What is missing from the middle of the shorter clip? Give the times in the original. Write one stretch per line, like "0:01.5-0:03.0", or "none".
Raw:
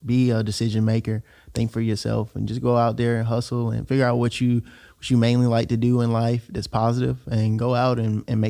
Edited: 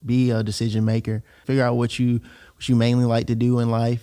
0:01.4-0:03.8